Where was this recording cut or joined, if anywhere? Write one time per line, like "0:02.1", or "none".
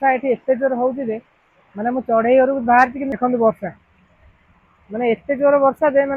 none